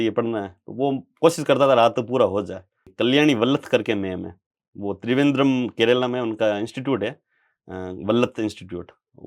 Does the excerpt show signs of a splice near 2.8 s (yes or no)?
yes